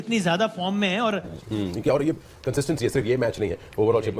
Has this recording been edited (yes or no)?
yes